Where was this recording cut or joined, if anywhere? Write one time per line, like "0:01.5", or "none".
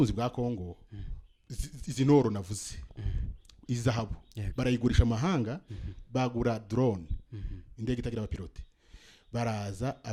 none